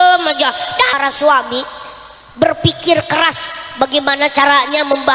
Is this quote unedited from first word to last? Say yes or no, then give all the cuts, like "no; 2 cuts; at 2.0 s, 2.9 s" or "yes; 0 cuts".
no; 1 cut; at 1.0 s